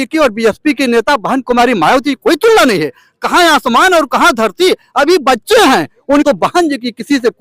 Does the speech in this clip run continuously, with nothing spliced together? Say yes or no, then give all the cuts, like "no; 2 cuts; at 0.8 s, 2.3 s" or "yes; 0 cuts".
no; 1 cut; at 6.2 s